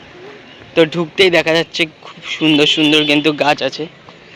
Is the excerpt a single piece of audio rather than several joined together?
yes; 0 cuts

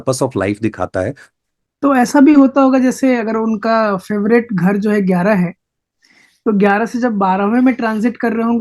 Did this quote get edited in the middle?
yes; 1 cut; at 1.2 s

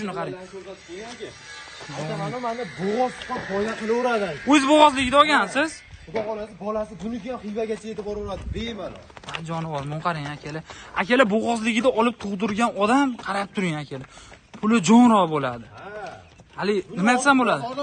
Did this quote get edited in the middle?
no; 0 cuts

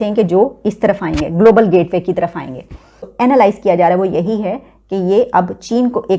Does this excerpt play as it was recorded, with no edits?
no; 1 cut; at 3.0 s

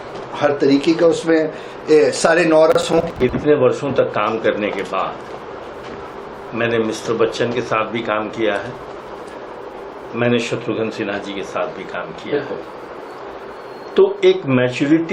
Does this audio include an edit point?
yes; 1 cut; at 3.2 s

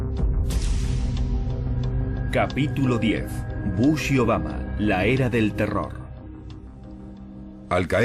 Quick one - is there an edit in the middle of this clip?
yes; 1 cut; at 6.3 s

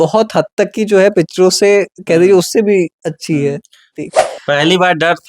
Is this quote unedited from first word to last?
no; 1 cut; at 4.0 s

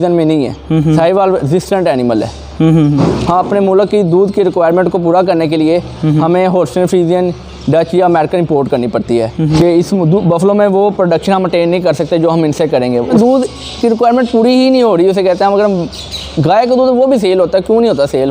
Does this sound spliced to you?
yes; 3 cuts; at 3.0 s, 9.6 s, 13.1 s

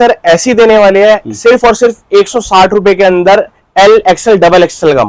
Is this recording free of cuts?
yes; 0 cuts

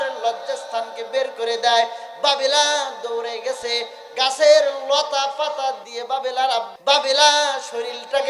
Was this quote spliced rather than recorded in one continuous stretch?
yes; 1 cut; at 6.7 s

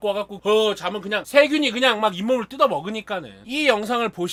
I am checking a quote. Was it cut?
no; 0 cuts

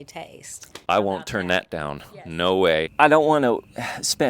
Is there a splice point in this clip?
yes; 1 cut; at 2.9 s

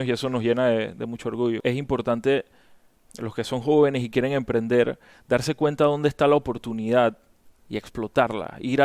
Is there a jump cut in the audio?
yes; 1 cut; at 1.6 s

